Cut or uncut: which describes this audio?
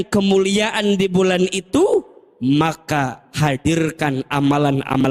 uncut